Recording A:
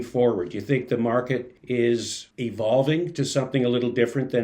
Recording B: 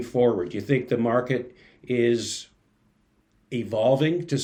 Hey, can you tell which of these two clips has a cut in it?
A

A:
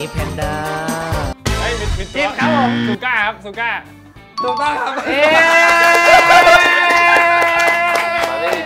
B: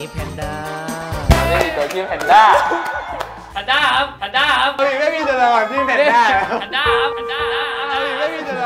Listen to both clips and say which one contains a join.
B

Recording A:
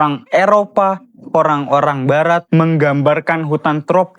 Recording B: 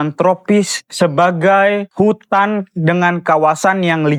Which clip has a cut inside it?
A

